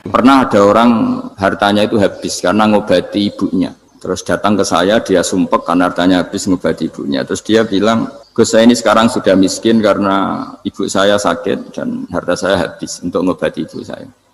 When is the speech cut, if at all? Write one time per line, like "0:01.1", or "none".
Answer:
0:01.3
0:03.9
0:08.2